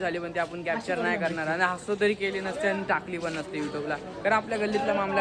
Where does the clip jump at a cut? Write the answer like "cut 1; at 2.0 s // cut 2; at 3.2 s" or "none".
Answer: none